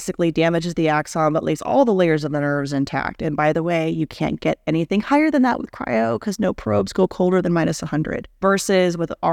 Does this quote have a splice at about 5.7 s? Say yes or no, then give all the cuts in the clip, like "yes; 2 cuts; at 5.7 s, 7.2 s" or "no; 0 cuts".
no; 1 cut; at 8.3 s